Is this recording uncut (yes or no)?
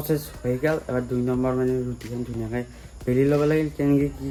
yes